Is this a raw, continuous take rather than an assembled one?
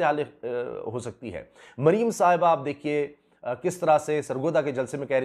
yes; 0 cuts

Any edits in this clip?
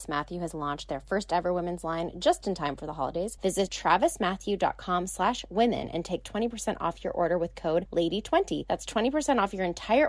yes; 3 cuts; at 3.6 s, 7.9 s, 8.6 s

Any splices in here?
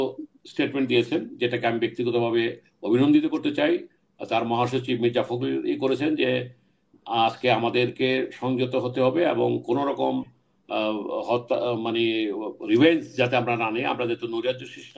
no; 0 cuts

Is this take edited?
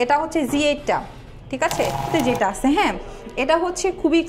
yes; 1 cut; at 2.1 s

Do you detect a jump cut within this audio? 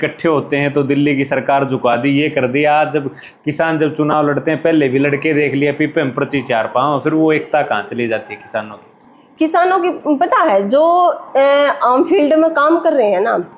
no; 0 cuts

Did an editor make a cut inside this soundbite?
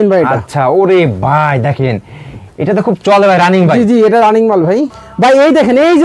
no; 0 cuts

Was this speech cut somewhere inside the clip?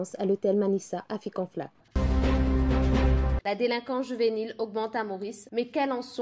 no; 0 cuts

